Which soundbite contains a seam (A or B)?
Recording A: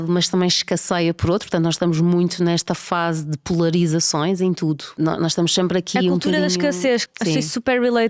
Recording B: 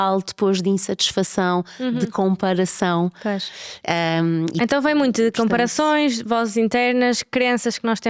A